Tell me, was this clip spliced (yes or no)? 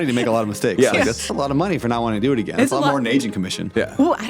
yes